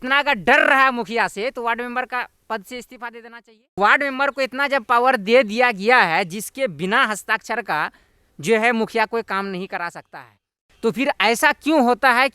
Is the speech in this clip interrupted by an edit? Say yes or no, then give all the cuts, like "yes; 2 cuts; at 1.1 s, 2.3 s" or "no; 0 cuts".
yes; 1 cut; at 3.8 s